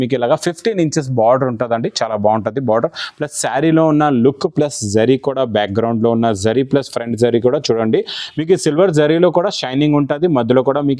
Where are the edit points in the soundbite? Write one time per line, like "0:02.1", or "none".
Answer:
none